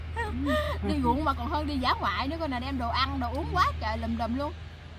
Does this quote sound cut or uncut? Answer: uncut